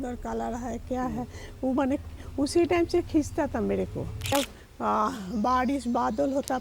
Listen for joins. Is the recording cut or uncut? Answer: cut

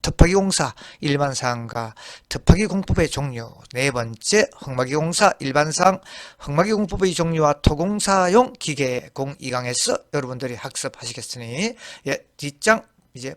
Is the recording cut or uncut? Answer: cut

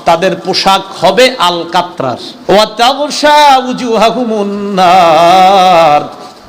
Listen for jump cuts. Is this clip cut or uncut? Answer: cut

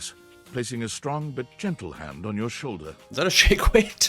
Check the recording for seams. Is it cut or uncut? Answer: cut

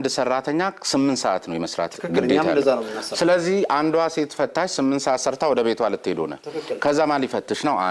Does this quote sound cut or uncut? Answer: uncut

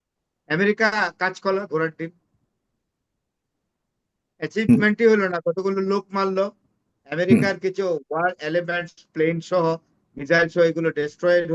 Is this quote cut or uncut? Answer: uncut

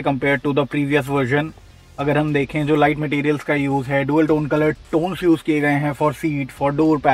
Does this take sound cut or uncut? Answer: uncut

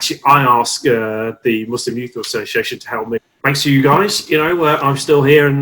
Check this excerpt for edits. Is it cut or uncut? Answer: cut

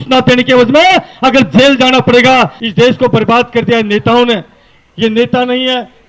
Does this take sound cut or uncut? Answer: cut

